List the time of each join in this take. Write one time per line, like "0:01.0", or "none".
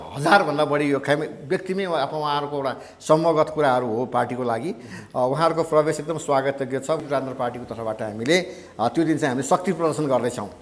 0:07.0